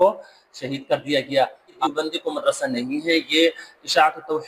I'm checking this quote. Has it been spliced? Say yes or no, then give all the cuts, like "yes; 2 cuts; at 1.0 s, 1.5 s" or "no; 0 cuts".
yes; 1 cut; at 1.8 s